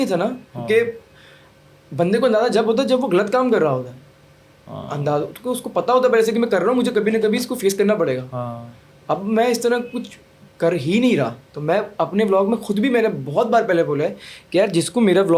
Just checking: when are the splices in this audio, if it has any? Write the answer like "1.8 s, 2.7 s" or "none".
11.5 s